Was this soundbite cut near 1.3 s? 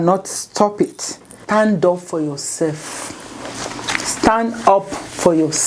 yes; 1 cut; at 1.3 s

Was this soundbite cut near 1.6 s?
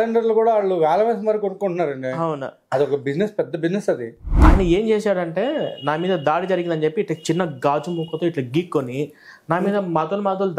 no; 1 cut; at 4.4 s

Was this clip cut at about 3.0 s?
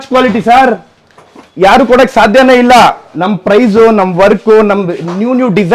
no; 0 cuts

